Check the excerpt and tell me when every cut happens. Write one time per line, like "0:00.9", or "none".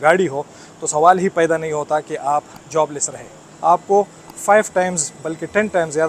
none